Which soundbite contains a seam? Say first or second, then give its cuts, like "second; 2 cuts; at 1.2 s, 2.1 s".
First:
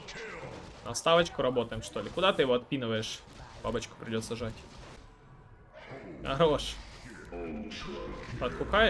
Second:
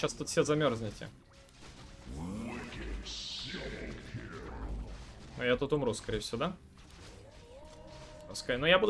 first; 1 cut; at 5.0 s